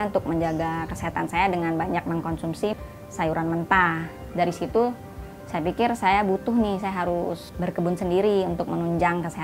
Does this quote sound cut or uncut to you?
cut